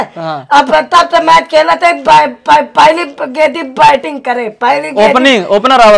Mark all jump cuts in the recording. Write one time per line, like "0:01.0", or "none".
none